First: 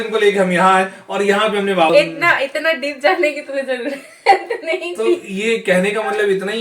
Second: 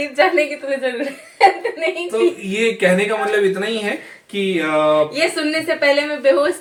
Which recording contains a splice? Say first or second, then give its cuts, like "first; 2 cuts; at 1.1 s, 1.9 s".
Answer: first; 1 cut; at 1.9 s